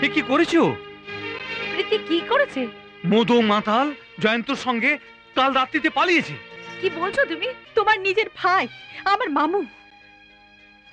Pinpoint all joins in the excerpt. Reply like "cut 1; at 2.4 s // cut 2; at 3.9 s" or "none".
cut 1; at 7.6 s